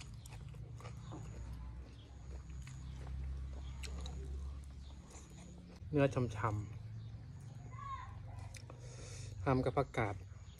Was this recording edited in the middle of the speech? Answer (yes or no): yes